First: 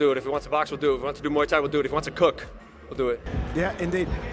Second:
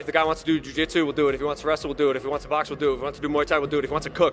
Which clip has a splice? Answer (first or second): first